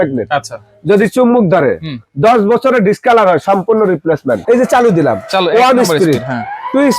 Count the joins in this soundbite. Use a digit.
1